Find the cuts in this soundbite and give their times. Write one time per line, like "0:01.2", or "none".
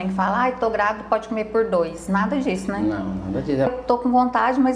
0:03.7